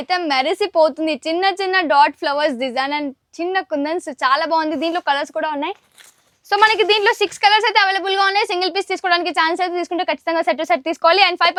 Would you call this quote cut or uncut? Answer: uncut